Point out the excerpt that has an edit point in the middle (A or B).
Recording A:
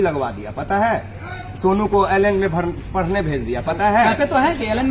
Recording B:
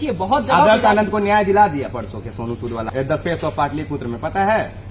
B